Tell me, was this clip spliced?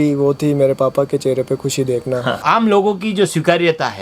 yes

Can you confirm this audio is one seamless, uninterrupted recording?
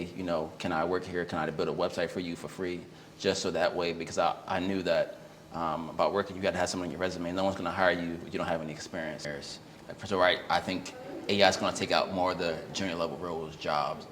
no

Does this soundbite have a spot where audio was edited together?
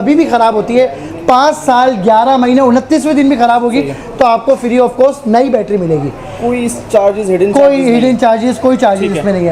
no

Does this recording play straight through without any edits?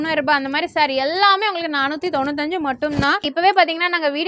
no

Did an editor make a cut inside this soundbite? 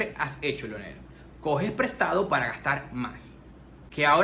no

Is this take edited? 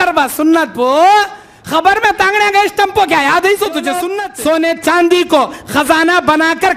yes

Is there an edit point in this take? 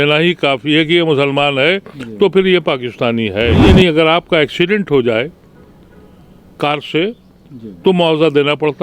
yes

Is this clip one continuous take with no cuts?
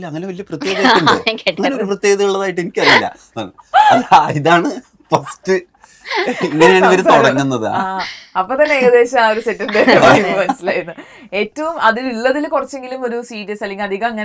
yes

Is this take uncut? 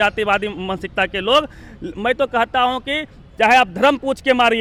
yes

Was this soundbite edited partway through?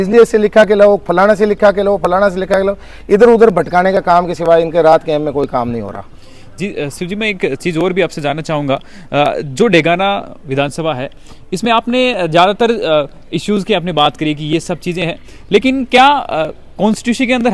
no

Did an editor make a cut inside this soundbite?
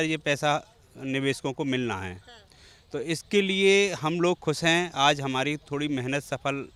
no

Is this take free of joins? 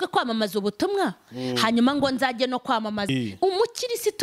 no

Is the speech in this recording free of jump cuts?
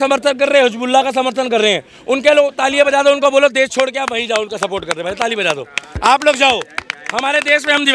yes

